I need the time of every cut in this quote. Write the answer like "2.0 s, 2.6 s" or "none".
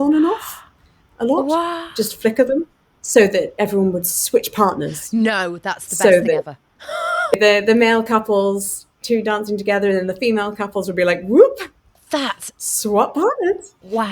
7.3 s